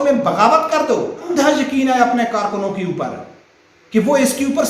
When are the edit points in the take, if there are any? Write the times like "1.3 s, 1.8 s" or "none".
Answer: 1.2 s